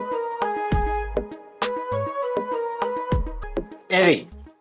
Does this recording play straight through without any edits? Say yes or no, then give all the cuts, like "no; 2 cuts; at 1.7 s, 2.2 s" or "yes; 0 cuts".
no; 1 cut; at 3.4 s